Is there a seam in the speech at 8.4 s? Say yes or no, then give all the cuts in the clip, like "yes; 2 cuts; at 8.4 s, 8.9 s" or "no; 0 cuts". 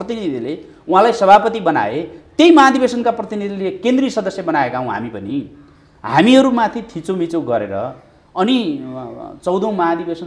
no; 0 cuts